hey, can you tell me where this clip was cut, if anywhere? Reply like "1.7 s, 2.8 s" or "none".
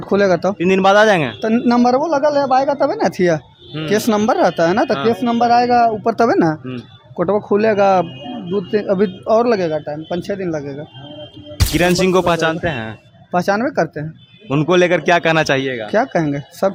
none